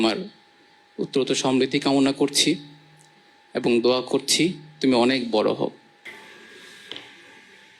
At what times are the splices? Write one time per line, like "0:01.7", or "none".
none